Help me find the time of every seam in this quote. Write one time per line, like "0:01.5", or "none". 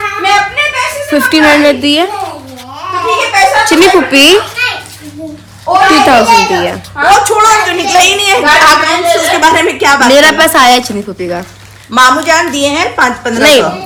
none